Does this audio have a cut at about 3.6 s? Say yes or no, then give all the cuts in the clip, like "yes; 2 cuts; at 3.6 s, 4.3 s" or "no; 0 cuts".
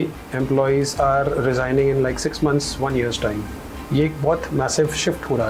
no; 0 cuts